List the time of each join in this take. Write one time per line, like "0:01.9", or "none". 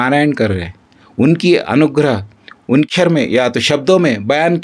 0:02.9